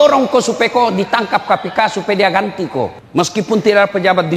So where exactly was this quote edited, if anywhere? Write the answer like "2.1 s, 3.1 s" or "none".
3.0 s